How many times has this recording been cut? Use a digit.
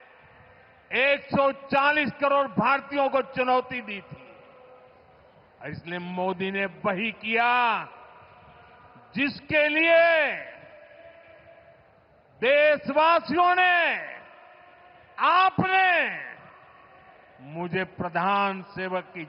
0